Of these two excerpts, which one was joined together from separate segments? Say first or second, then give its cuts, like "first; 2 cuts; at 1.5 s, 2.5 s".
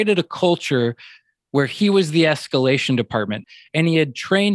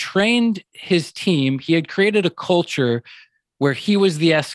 first; 1 cut; at 3.4 s